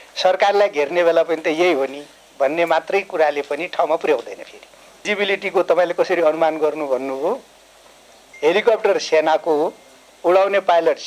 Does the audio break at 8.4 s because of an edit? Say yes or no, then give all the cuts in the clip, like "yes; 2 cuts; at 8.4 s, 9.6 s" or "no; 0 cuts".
no; 1 cut; at 5.0 s